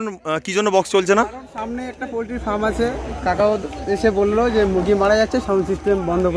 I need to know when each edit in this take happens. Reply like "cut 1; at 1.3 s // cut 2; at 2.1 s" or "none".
none